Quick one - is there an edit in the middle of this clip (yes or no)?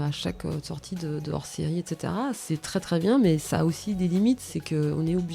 yes